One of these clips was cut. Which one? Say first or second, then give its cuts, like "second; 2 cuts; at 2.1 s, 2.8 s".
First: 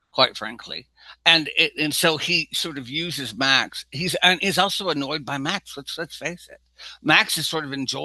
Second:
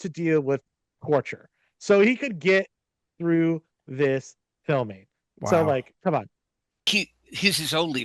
second; 1 cut; at 6.9 s